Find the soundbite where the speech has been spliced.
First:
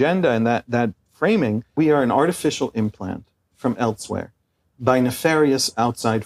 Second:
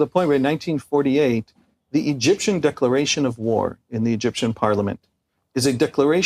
first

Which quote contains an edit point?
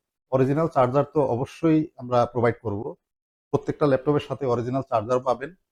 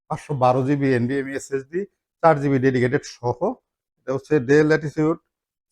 second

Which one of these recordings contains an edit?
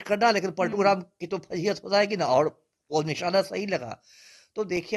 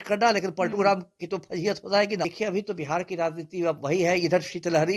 second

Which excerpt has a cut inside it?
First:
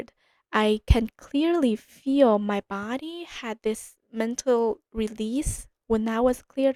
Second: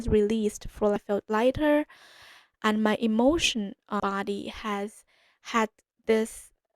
second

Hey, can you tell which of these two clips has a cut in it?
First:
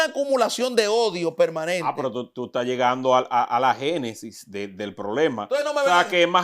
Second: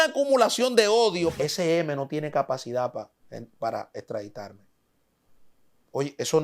second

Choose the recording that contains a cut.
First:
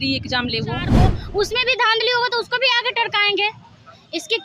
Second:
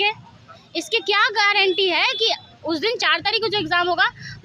first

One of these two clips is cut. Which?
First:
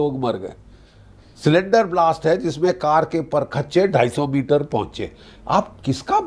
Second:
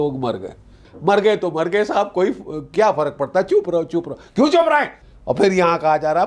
second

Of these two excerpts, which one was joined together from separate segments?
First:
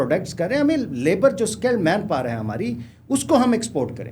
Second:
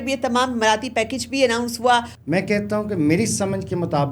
second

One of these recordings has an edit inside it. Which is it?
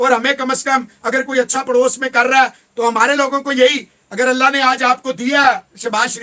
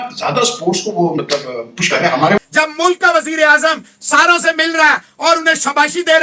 second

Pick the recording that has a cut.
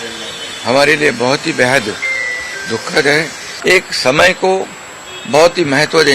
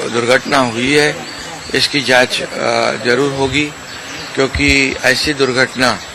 first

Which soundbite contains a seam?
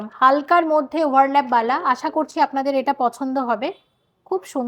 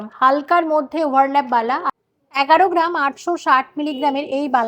second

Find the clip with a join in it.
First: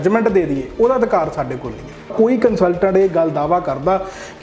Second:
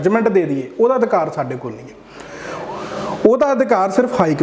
first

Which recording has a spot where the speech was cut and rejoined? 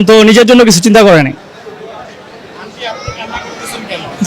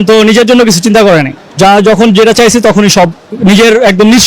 second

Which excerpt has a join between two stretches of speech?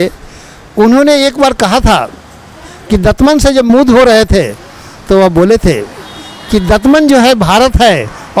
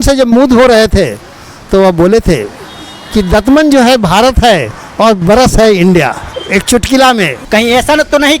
second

